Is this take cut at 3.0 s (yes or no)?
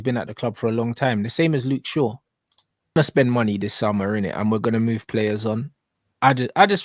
yes